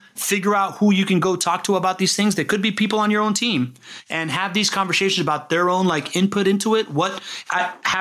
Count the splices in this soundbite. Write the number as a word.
zero